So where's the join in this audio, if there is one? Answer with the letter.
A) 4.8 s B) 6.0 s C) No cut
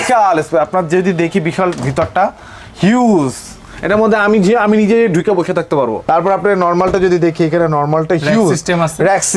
C